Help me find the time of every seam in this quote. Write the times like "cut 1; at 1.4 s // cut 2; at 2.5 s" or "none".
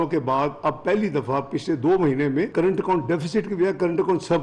cut 1; at 2.5 s